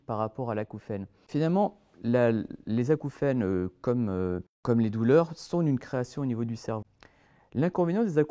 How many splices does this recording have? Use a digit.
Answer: 3